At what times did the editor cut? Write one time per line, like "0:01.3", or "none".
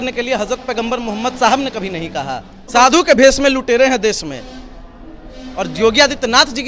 0:02.7